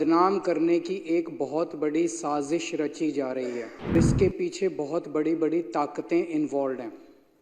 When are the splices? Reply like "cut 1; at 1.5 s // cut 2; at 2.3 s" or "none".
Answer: cut 1; at 3.9 s

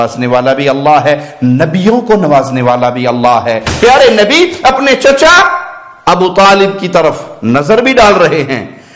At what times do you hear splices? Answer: cut 1; at 3.7 s

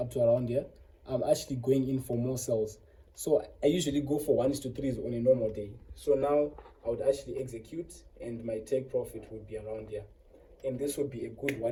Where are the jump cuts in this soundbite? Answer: none

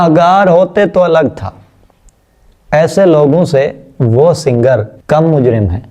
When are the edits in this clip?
cut 1; at 4.9 s

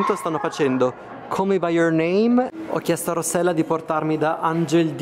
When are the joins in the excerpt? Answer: cut 1; at 2.5 s

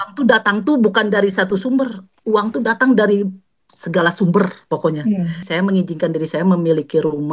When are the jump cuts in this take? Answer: cut 1; at 5.5 s

